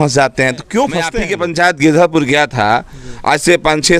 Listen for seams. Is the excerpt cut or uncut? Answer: cut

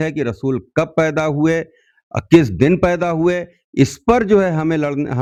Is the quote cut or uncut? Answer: uncut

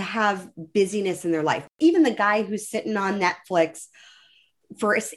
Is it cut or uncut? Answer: cut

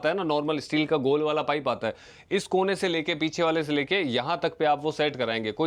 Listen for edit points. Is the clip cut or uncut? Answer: uncut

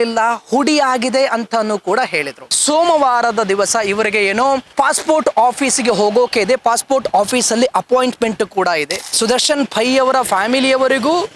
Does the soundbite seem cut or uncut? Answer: cut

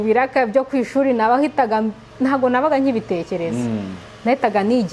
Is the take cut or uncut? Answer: uncut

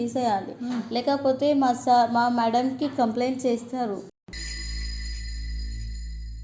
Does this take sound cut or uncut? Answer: uncut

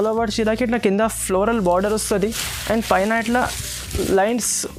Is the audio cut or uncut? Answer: uncut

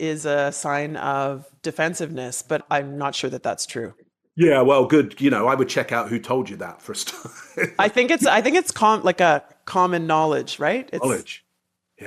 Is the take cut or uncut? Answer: cut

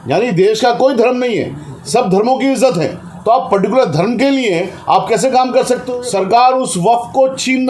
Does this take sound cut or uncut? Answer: cut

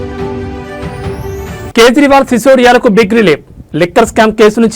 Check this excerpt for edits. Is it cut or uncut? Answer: uncut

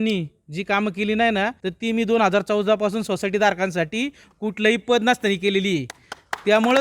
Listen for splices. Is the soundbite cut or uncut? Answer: cut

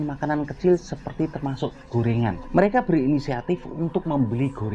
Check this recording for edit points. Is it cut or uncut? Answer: cut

